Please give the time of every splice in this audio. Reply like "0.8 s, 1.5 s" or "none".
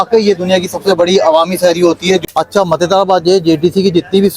2.2 s